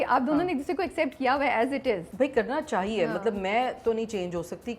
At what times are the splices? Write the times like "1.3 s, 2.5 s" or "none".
2.1 s